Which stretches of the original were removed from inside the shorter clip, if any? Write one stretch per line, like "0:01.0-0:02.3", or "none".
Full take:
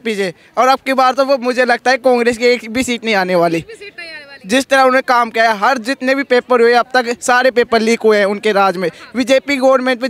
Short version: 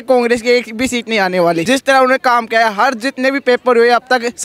0:03.6-0:04.5